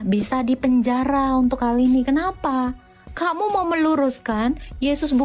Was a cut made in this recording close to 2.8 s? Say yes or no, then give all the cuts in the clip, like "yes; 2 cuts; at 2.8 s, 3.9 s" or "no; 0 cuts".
no; 0 cuts